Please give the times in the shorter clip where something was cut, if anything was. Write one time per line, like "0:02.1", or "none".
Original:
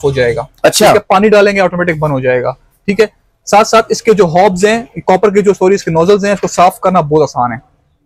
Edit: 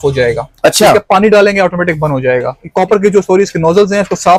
0:02.6